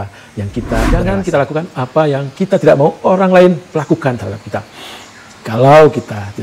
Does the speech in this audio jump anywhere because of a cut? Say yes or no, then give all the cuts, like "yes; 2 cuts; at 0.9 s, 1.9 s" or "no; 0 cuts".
yes; 1 cut; at 1.0 s